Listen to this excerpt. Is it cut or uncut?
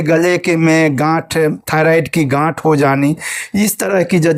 uncut